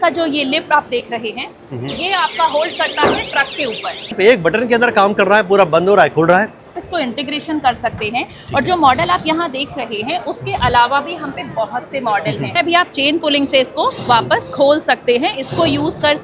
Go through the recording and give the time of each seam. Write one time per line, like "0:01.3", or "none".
0:04.1
0:06.8
0:12.5